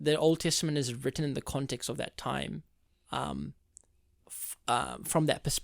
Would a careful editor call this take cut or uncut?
uncut